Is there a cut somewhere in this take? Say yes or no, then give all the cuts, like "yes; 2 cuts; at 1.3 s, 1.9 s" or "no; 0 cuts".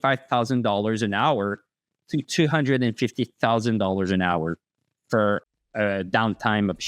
yes; 1 cut; at 5.5 s